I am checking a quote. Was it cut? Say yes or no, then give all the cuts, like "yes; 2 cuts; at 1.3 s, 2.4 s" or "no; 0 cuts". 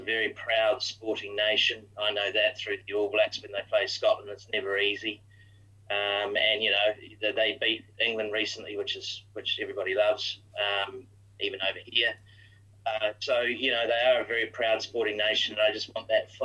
no; 0 cuts